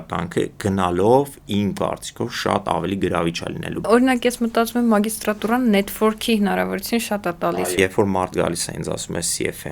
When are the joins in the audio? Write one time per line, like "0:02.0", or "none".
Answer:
0:03.8
0:07.7